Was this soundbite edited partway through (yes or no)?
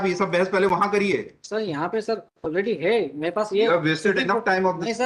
no